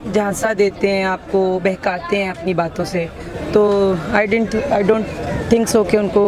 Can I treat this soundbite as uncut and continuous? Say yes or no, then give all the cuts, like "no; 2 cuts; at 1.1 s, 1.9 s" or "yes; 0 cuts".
yes; 0 cuts